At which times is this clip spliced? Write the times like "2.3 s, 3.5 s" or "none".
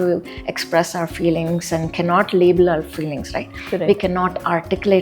none